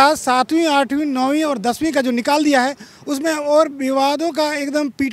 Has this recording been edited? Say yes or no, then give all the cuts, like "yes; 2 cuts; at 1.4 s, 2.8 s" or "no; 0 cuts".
no; 0 cuts